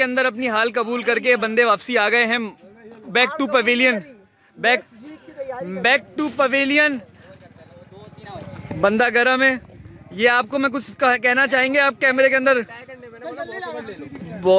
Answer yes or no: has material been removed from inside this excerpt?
no